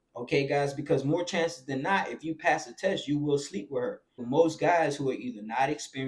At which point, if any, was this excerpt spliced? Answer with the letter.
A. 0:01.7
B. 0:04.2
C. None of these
B